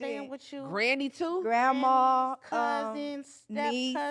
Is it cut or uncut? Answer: uncut